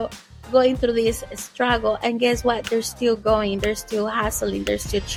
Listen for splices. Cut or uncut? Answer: uncut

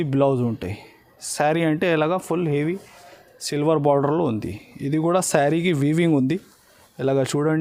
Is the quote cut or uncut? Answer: uncut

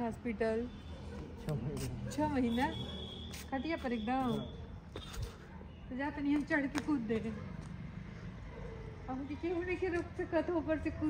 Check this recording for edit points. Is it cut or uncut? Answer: uncut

